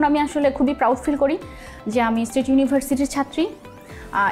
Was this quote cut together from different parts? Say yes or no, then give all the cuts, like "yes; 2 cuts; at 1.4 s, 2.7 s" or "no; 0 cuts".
no; 0 cuts